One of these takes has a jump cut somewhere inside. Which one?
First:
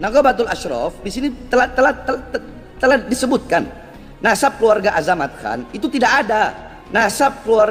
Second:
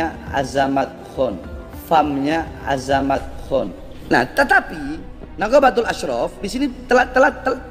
second; 1 cut; at 3.9 s

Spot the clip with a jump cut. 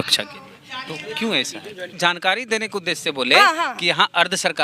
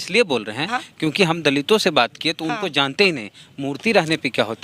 first; 1 cut; at 1.9 s

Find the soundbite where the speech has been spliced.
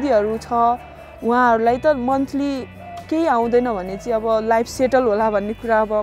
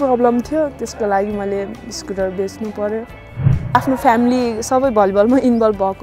second; 1 cut; at 3.7 s

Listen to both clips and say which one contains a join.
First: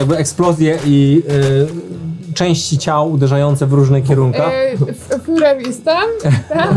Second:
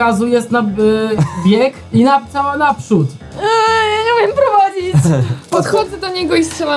second; 2 cuts; at 1.8 s, 5.5 s

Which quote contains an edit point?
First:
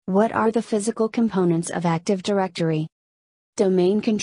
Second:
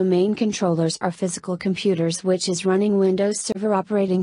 second; 1 cut; at 0.9 s

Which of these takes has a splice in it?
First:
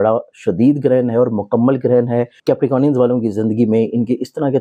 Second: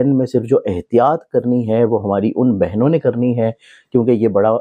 first; 1 cut; at 2.3 s

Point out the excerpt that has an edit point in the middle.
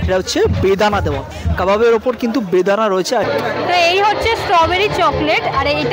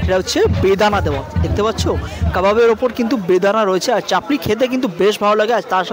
first; 2 cuts; at 1.4 s, 3.3 s

